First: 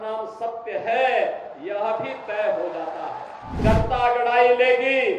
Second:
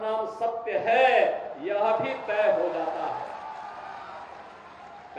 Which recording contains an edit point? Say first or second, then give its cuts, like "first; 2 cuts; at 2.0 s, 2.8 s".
first; 1 cut; at 3.6 s